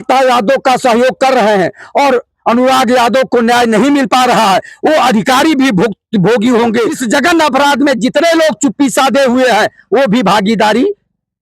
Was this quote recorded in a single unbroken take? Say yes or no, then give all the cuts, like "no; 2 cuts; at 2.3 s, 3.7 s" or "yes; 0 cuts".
no; 1 cut; at 7.0 s